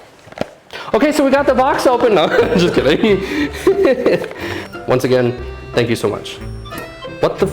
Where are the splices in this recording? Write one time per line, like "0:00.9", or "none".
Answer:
0:04.6